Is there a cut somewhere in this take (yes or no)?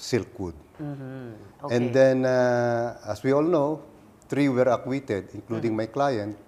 yes